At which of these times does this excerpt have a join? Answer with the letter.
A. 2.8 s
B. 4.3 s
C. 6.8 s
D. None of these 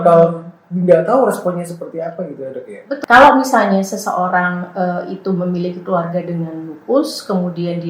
A